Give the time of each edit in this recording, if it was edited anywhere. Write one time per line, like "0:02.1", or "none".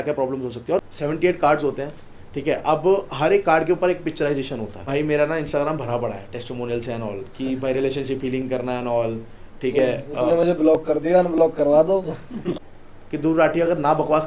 0:00.8
0:04.8
0:12.5